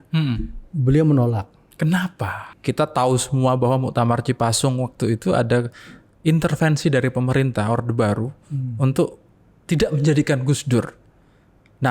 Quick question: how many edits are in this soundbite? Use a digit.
1